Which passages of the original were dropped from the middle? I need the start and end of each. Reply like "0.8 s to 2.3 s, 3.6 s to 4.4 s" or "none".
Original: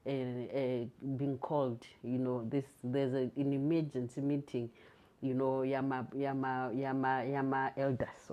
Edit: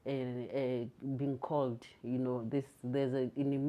none